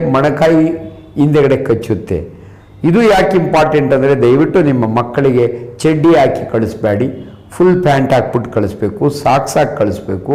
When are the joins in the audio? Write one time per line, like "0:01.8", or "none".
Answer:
none